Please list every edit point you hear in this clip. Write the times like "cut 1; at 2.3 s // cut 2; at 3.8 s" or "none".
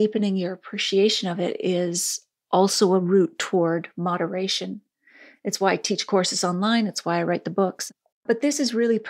cut 1; at 7.9 s